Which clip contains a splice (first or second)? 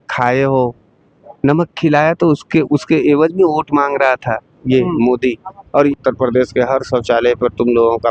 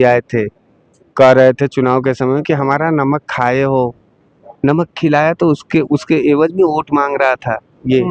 first